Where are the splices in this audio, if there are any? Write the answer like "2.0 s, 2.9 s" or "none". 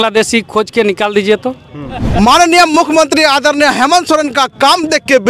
2.0 s